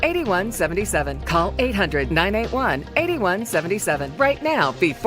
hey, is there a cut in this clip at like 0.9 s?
yes; 1 cut; at 0.9 s

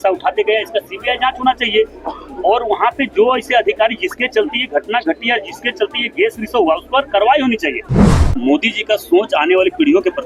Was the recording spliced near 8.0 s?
yes; 1 cut; at 8.0 s

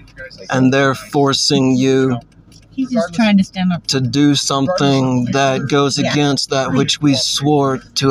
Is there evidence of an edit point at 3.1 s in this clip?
no; 0 cuts

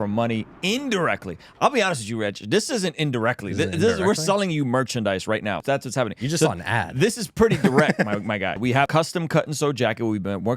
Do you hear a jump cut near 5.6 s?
yes; 2 cuts; at 5.6 s, 8.7 s

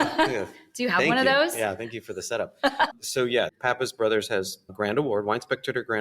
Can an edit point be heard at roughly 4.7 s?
yes; 2 cuts; at 3.5 s, 4.7 s

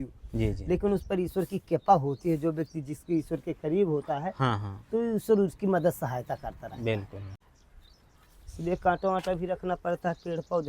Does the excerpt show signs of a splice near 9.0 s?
no; 1 cut; at 7.2 s

